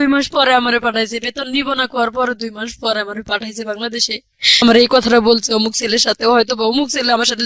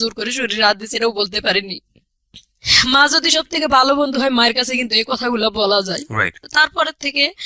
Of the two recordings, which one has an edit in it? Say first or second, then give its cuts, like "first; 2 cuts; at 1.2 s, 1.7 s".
first; 1 cut; at 4.6 s